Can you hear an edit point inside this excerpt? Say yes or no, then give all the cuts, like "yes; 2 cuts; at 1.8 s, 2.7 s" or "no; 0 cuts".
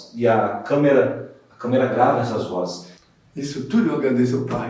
yes; 1 cut; at 2.8 s